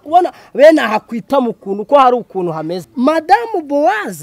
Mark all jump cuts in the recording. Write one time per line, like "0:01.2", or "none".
0:02.8